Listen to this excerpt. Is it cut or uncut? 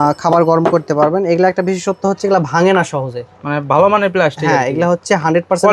uncut